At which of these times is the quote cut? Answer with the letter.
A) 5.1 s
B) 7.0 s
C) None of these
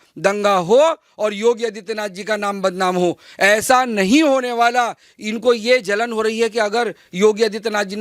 A